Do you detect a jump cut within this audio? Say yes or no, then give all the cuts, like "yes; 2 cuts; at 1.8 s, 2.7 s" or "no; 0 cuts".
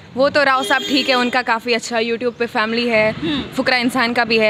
no; 0 cuts